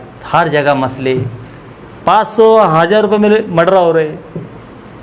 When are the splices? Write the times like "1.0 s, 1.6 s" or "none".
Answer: none

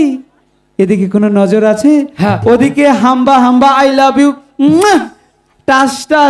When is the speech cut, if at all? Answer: none

